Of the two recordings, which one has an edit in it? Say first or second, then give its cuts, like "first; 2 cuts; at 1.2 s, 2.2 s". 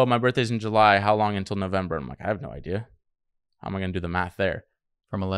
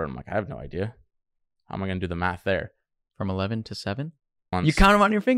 second; 1 cut; at 4.4 s